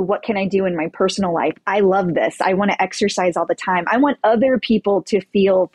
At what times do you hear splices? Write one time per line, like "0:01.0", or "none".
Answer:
none